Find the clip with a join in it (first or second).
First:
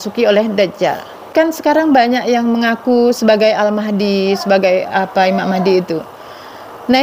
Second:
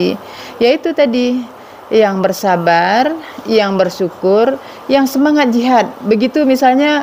first